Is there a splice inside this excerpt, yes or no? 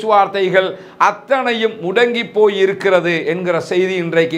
no